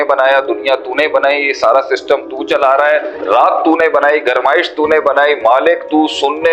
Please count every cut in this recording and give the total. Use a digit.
1